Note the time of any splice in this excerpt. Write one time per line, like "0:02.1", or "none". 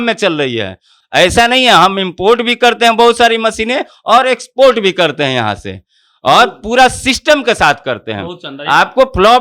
none